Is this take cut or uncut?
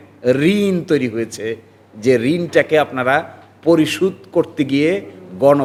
uncut